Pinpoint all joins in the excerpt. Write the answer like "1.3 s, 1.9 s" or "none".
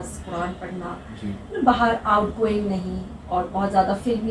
none